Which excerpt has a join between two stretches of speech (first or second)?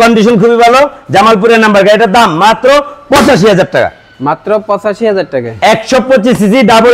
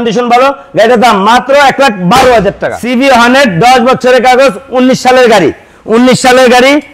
second